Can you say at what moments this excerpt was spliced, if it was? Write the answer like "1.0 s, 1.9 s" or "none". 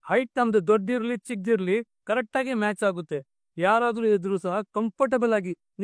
none